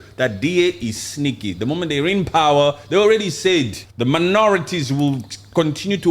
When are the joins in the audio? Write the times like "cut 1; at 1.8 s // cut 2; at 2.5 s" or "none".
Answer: cut 1; at 3.8 s